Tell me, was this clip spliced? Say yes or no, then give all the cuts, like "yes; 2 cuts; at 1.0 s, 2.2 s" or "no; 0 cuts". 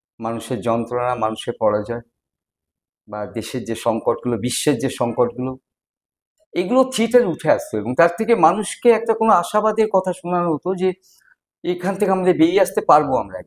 no; 0 cuts